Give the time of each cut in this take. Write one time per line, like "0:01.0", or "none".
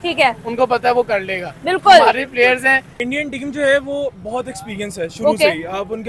0:02.9